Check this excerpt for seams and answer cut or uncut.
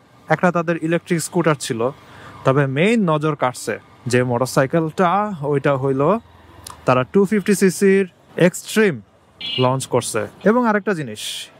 cut